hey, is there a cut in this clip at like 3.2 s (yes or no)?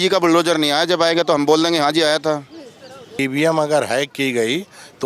yes